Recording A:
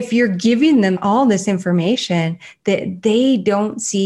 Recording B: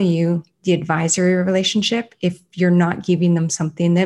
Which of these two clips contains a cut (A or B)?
A